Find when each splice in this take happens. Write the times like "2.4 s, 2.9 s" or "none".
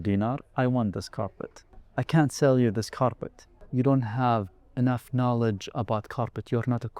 1.8 s, 3.5 s